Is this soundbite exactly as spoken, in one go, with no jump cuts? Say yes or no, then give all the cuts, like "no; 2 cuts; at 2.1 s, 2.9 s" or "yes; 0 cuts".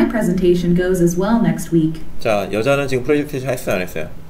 yes; 0 cuts